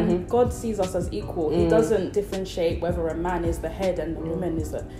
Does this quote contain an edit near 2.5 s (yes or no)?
no